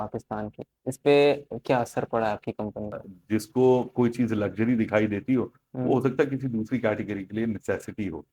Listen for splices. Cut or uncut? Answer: cut